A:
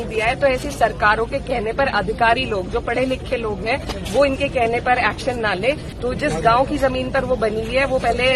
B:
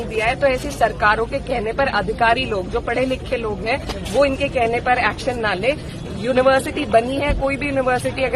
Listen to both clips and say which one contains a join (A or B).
A